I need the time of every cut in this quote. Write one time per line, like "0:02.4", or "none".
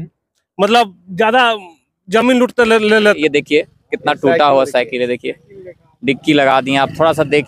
0:03.2

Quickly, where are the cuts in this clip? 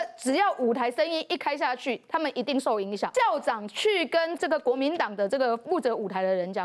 0:03.1
0:04.3

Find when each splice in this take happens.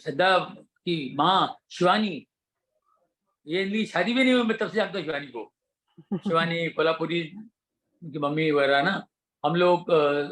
none

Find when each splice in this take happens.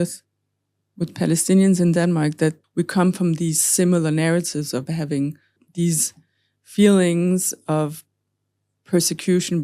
0:02.6
0:05.6

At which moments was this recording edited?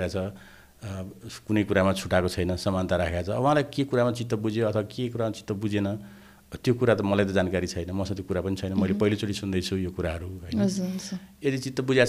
none

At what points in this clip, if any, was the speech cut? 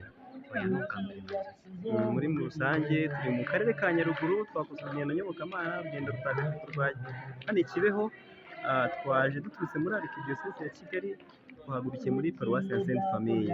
none

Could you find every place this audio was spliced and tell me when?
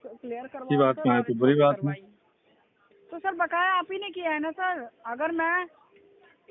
none

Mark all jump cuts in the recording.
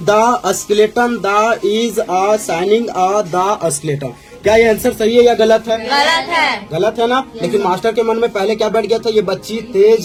none

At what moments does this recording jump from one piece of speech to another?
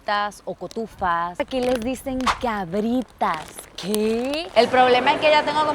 0:01.4
0:04.5

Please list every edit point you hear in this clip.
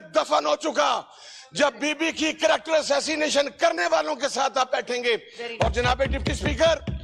none

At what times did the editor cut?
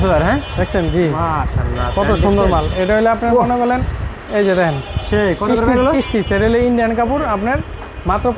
none

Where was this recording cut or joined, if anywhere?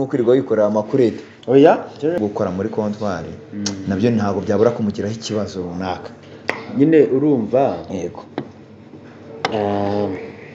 0:02.2

